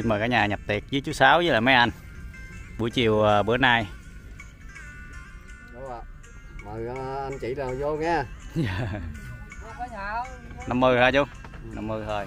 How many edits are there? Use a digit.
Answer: 1